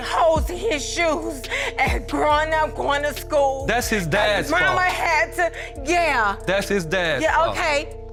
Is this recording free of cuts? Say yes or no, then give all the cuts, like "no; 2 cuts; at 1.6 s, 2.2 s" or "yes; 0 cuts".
yes; 0 cuts